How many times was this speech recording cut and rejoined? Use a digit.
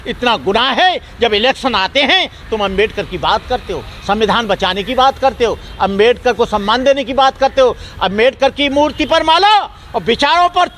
0